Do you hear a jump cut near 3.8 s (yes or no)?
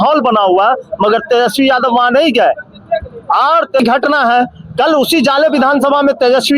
yes